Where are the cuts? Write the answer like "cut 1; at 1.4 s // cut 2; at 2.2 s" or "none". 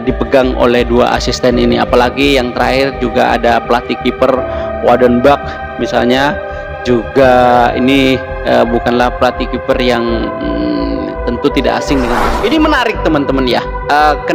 cut 1; at 12.2 s